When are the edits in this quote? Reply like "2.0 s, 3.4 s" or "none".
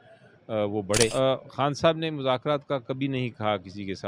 1.1 s